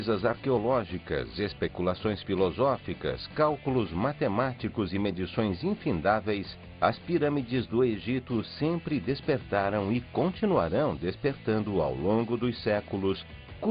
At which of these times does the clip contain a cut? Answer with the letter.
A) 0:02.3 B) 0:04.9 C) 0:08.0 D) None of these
D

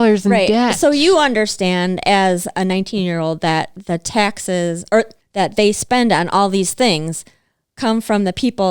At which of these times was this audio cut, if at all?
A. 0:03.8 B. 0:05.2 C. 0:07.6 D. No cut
B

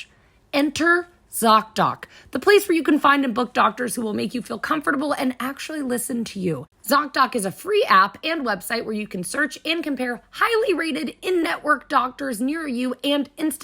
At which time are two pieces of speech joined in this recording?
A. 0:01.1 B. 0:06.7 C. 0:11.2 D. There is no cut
B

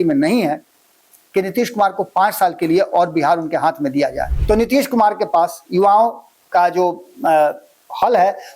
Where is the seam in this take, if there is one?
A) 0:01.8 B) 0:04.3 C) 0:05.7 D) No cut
B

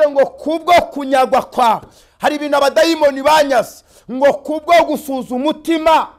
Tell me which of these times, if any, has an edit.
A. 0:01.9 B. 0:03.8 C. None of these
C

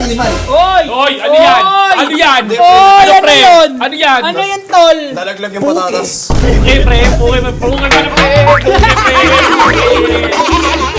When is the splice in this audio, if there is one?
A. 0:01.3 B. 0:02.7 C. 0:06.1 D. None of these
D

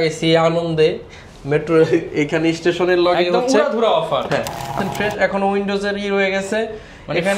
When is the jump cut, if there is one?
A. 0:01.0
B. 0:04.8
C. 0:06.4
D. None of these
B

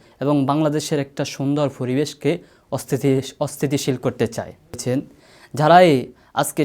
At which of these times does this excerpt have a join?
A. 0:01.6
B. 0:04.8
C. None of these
B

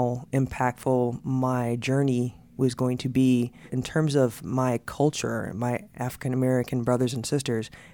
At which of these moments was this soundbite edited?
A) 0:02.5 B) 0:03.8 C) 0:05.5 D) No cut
B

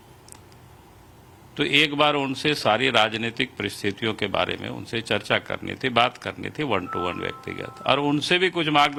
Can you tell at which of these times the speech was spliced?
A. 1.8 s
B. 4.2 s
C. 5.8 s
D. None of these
D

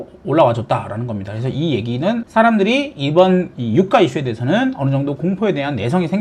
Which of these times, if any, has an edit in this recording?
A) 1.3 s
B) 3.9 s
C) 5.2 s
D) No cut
D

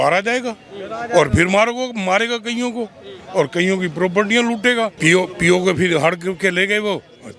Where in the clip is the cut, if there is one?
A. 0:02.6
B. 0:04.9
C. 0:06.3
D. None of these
B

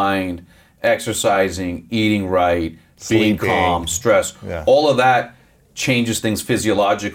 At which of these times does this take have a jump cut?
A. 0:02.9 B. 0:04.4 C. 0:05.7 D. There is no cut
D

